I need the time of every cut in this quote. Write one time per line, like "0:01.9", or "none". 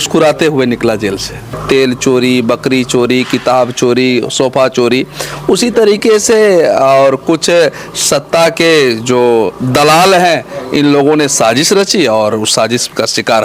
0:01.6